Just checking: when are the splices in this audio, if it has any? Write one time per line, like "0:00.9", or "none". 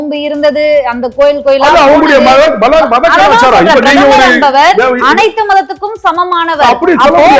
none